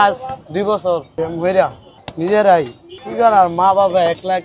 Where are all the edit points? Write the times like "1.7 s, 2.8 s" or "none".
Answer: 1.1 s, 1.8 s